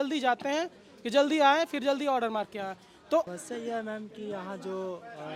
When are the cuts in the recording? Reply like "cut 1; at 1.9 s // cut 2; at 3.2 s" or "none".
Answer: cut 1; at 3.3 s

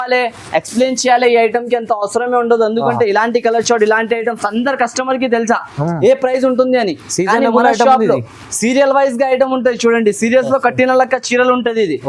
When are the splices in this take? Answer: none

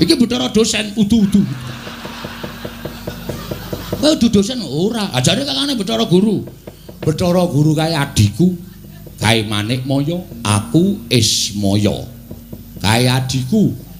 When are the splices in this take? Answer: none

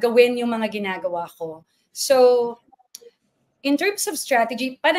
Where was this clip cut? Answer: none

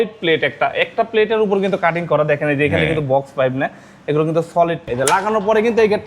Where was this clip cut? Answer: cut 1; at 4.8 s

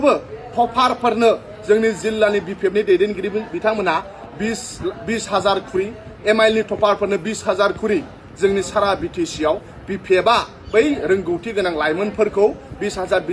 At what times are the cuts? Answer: none

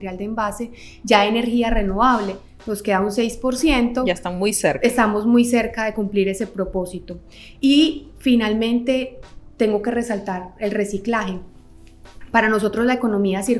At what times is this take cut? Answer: none

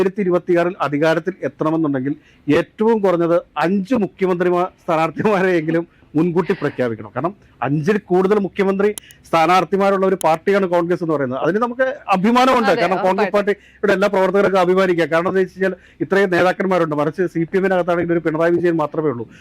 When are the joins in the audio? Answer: none

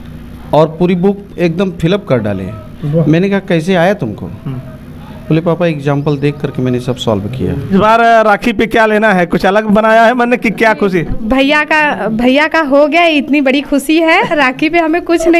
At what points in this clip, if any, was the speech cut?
cut 1; at 7.7 s

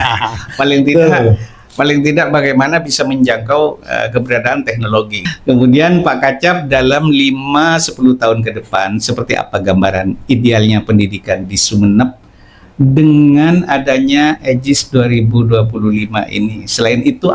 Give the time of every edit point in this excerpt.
cut 1; at 5.3 s

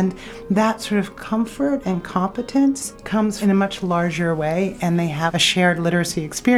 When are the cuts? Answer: cut 1; at 1.2 s // cut 2; at 3.3 s // cut 3; at 5.3 s

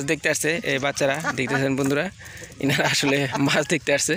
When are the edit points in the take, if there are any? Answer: none

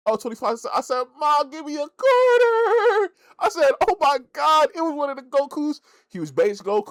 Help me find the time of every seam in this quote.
none

